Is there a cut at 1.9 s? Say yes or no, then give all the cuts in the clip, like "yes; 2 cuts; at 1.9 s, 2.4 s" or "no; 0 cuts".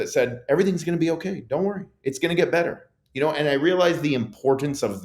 no; 0 cuts